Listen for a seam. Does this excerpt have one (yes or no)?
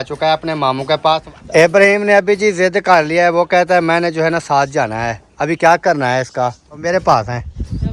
yes